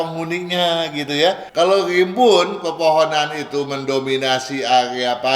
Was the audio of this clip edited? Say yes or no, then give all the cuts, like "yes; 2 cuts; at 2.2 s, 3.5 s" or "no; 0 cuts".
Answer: yes; 1 cut; at 1.4 s